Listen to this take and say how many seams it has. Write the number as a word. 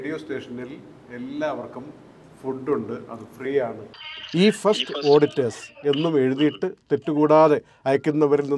one